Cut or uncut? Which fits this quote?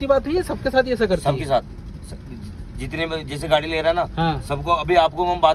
uncut